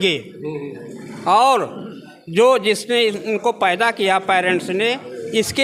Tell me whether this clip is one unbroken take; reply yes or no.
yes